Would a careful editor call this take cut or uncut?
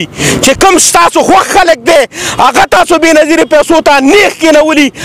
uncut